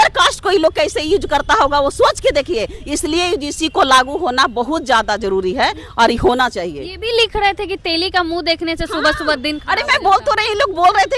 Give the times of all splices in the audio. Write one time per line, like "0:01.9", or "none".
none

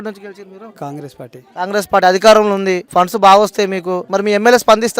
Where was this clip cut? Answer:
0:04.0

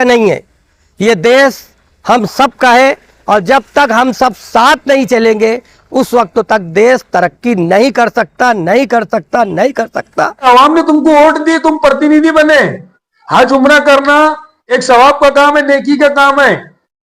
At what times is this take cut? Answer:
0:10.4

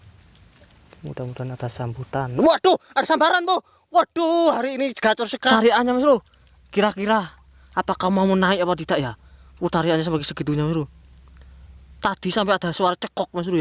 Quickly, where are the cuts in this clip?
0:05.5

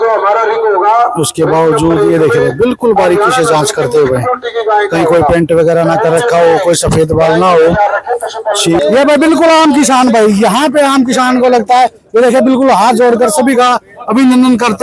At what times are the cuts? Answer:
0:08.8

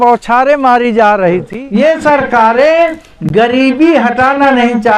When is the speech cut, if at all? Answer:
0:01.6

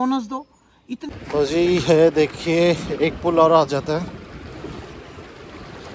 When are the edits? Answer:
0:01.0

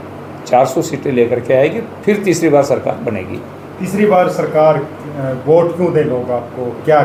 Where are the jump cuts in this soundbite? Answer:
none

